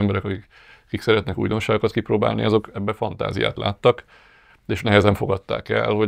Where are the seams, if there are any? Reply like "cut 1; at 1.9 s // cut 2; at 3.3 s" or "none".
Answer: none

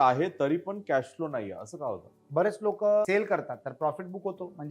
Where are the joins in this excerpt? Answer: cut 1; at 2.1 s // cut 2; at 3.1 s

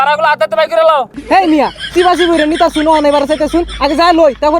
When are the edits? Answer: cut 1; at 1.1 s

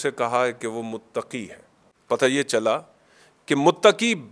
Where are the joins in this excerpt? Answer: cut 1; at 1.6 s

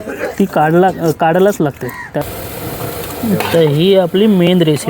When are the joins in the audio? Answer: cut 1; at 2.3 s

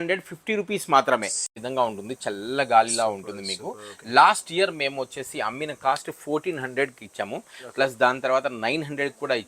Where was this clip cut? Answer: cut 1; at 1.6 s

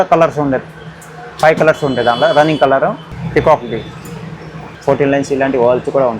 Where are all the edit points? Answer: cut 1; at 3.1 s // cut 2; at 4.7 s

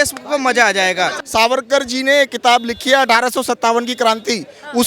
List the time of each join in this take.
cut 1; at 1.2 s

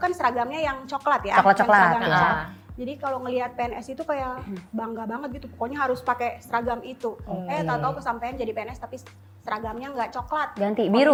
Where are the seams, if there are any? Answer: none

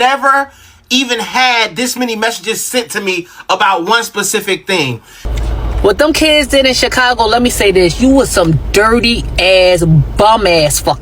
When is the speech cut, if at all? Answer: cut 1; at 5.3 s

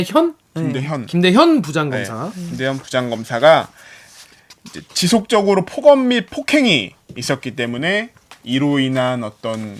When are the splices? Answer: none

